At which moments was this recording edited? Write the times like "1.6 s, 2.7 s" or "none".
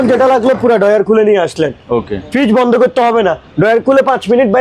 none